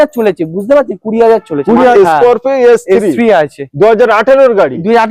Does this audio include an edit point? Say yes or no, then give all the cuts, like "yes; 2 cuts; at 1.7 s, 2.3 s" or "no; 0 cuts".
yes; 1 cut; at 1.9 s